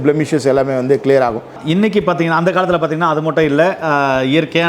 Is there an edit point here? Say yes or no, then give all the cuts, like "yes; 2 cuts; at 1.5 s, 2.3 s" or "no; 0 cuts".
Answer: yes; 1 cut; at 1.5 s